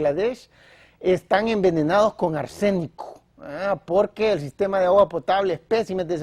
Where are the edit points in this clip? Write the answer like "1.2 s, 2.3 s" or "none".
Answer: 5.2 s